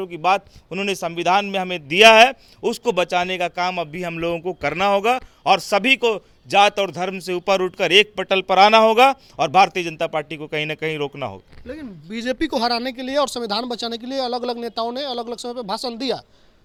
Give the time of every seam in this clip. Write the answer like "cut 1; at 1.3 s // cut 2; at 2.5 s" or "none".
none